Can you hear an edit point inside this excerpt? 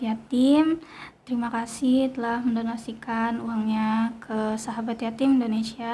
no; 0 cuts

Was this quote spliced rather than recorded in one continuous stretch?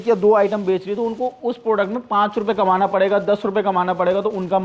no; 0 cuts

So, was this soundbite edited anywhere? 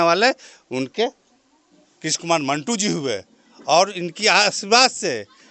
no; 0 cuts

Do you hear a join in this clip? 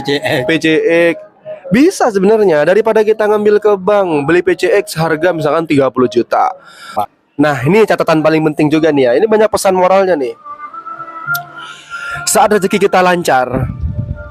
yes; 1 cut; at 7.0 s

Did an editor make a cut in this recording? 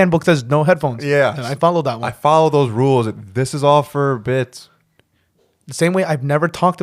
no; 0 cuts

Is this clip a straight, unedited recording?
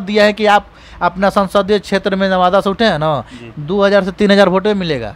yes; 0 cuts

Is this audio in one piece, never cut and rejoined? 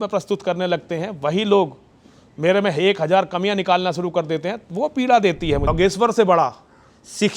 no; 1 cut; at 5.7 s

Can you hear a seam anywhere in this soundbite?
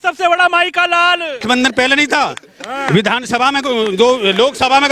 yes; 1 cut; at 1.4 s

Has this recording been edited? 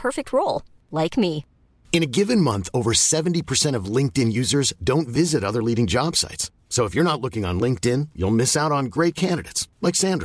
no; 0 cuts

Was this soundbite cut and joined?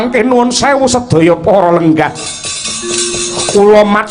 no; 0 cuts

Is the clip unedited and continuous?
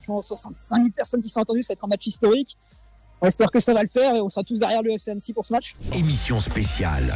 no; 1 cut; at 5.8 s

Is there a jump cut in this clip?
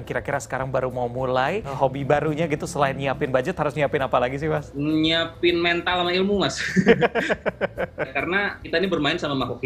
yes; 3 cuts; at 1.7 s, 4.7 s, 8.1 s

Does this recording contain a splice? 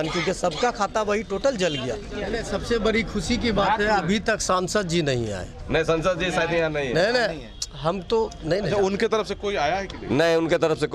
yes; 1 cut; at 2.3 s

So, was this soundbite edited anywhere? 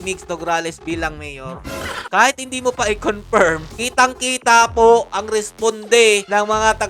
no; 0 cuts

